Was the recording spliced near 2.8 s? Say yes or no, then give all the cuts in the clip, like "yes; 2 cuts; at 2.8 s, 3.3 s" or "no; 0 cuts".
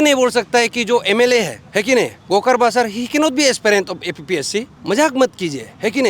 no; 2 cuts; at 1.6 s, 4.7 s